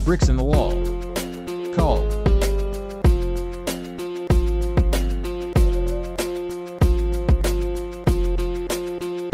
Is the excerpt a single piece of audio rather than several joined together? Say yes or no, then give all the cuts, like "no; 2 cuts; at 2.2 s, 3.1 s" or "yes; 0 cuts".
yes; 0 cuts